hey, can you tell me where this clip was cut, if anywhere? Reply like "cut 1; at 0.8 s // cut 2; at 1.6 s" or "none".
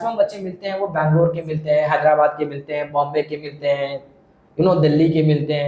none

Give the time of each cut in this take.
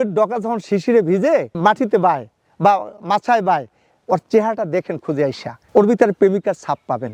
none

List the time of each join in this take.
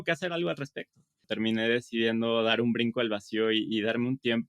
cut 1; at 1.3 s

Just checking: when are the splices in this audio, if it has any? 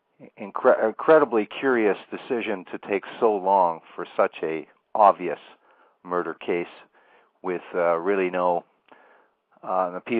cut 1; at 8.1 s

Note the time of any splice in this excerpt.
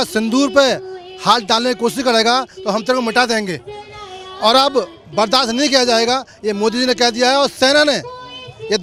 none

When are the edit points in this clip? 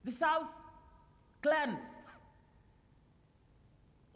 none

